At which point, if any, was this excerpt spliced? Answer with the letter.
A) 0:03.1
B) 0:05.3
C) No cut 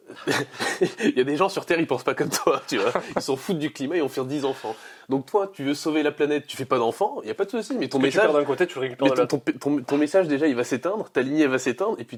C